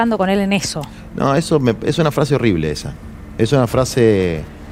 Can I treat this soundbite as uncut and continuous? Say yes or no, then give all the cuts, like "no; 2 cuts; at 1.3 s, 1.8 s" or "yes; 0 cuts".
yes; 0 cuts